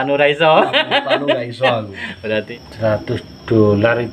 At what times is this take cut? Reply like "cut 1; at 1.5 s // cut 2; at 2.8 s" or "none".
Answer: cut 1; at 2.5 s